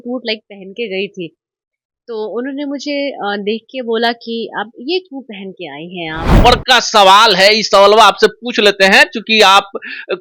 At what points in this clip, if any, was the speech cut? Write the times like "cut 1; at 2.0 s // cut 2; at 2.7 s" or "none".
cut 1; at 6.4 s